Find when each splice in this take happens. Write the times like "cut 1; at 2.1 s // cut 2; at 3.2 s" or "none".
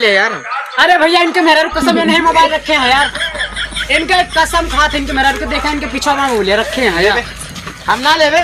none